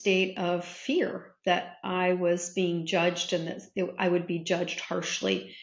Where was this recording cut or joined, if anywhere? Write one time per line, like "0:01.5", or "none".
none